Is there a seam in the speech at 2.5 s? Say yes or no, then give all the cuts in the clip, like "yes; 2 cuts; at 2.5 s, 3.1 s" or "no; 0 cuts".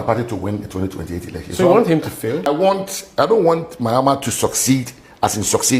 yes; 1 cut; at 2.5 s